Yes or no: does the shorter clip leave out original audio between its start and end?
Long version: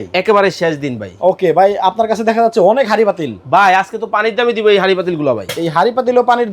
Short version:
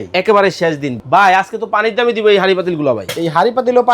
yes